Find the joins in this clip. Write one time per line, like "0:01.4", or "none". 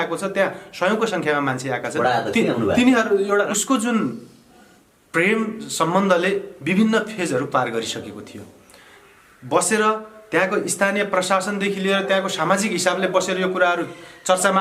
0:03.5